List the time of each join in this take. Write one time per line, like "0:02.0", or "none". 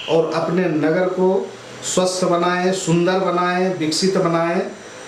none

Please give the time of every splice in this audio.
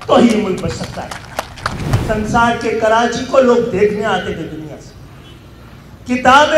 0:02.0

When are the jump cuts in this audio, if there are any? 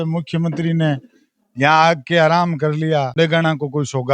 0:03.1

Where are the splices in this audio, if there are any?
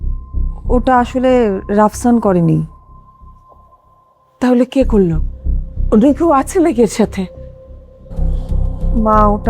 0:08.1

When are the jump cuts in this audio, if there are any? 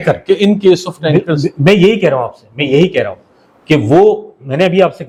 none

